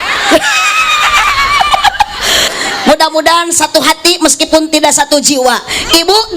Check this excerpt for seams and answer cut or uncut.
cut